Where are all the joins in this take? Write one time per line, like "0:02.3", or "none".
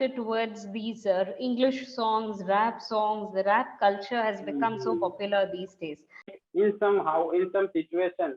0:06.3